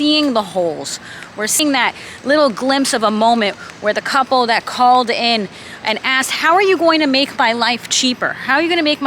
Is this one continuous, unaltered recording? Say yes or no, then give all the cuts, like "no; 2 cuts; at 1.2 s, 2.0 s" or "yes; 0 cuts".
no; 1 cut; at 1.6 s